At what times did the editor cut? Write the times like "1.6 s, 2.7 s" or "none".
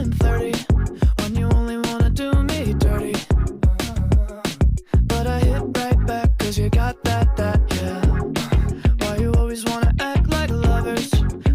4.8 s